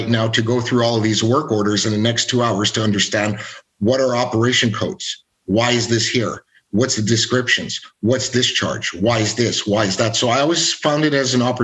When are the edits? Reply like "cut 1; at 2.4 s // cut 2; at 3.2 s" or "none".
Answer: none